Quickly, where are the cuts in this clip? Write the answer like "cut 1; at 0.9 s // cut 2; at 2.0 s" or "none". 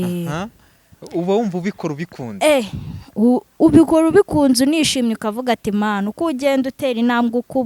none